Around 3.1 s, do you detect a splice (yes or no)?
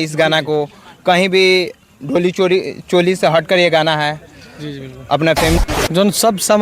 no